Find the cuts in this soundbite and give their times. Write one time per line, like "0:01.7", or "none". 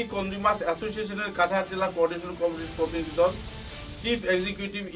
none